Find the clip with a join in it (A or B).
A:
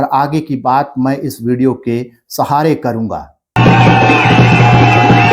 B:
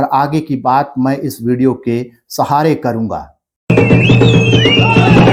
A